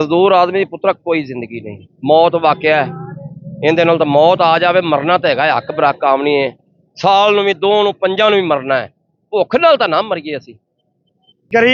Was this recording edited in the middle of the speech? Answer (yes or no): no